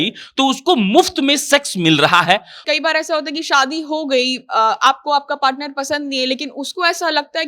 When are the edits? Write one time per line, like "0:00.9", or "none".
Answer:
0:02.6